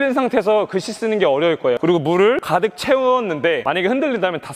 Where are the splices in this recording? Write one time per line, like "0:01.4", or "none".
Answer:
0:01.8
0:02.4
0:03.6

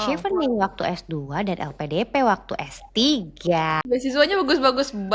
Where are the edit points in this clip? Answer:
0:03.8

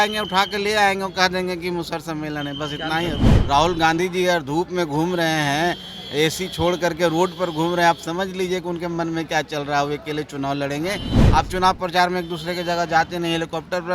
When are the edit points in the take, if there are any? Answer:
0:03.3
0:11.1

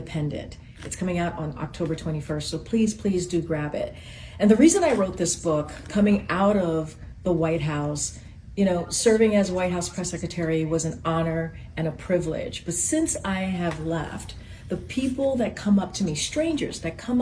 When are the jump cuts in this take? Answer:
0:01.2

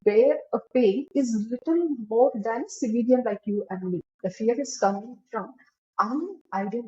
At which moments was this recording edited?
0:04.1

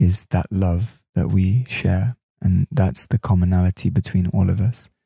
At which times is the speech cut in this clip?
0:02.4

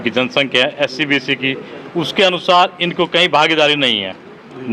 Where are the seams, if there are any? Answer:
none

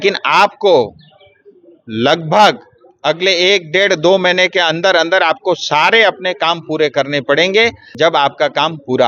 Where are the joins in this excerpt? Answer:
0:07.8

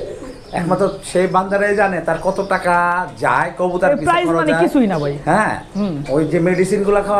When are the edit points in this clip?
none

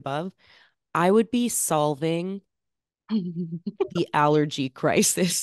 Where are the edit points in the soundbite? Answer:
none

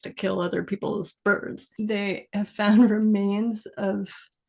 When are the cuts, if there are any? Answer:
0:01.6

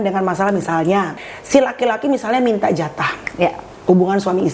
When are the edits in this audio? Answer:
0:01.2

